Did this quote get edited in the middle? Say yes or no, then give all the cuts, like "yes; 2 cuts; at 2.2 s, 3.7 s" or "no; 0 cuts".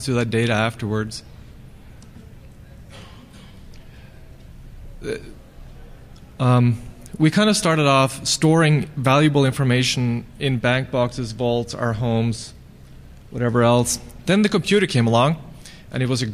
no; 0 cuts